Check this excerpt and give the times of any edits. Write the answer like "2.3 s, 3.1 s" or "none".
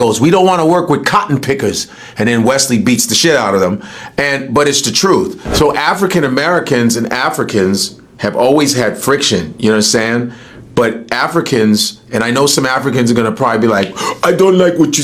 none